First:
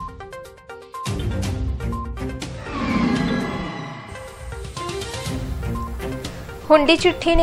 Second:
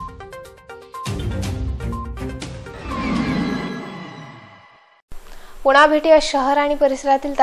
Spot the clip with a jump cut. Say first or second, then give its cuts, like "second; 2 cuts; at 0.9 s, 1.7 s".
first; 1 cut; at 2.4 s